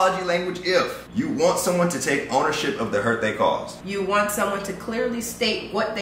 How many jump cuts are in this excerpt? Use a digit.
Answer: 1